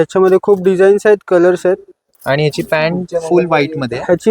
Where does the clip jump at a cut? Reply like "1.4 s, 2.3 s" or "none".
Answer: 2.1 s